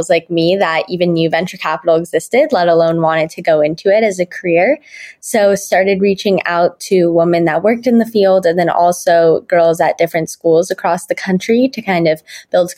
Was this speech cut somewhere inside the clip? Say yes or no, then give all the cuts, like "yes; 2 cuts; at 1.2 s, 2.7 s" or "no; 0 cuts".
no; 0 cuts